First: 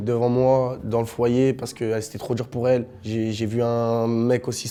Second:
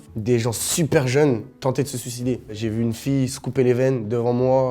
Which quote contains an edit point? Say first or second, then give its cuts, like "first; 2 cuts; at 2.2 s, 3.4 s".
second; 2 cuts; at 1.5 s, 2.5 s